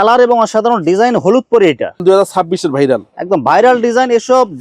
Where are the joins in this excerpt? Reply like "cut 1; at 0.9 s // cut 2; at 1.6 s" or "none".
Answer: cut 1; at 2.0 s